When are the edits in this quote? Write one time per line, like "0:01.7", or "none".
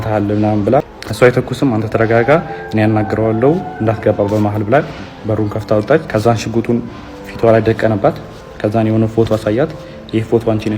0:01.0
0:06.1

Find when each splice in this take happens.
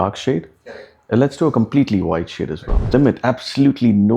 0:02.9

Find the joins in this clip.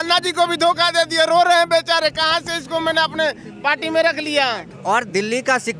0:04.7

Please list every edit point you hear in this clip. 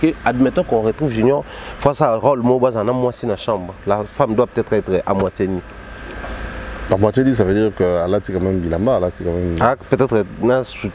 none

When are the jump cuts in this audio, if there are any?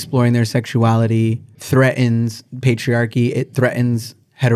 none

